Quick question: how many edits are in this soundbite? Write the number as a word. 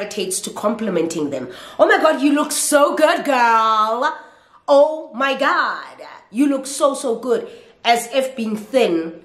zero